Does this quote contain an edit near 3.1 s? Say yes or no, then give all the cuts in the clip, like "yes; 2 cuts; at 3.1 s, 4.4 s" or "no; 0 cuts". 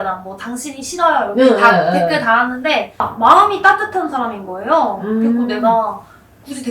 yes; 1 cut; at 3.1 s